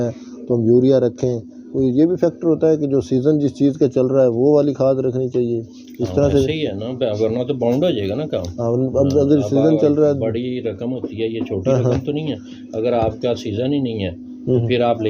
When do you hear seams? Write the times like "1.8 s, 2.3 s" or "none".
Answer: none